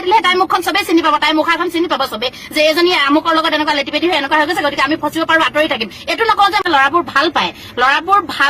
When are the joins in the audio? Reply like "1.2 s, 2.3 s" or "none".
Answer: 6.6 s